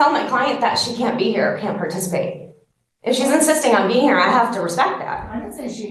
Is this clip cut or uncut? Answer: uncut